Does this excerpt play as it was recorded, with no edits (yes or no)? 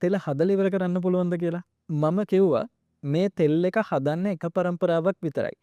yes